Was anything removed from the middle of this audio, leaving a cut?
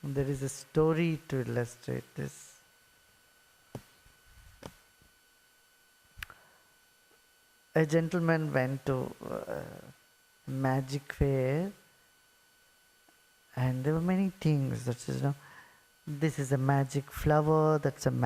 no; 0 cuts

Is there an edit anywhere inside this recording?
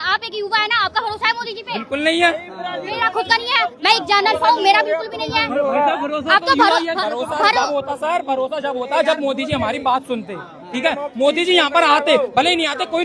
no; 0 cuts

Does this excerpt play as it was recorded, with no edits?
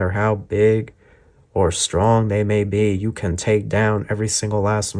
yes; 0 cuts

